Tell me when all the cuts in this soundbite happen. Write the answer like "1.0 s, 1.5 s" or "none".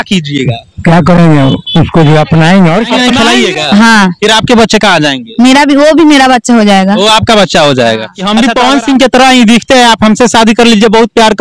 3.1 s, 8.2 s